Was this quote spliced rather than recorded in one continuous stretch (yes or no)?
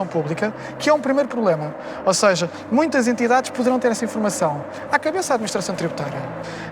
no